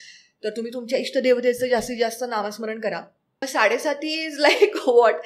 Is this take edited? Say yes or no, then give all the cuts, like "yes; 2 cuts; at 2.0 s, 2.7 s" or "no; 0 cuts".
yes; 1 cut; at 3.4 s